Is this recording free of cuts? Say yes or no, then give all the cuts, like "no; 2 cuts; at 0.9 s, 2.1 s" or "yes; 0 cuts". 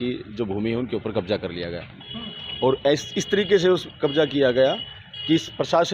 yes; 0 cuts